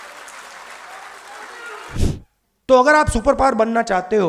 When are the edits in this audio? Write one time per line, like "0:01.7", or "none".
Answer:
0:02.0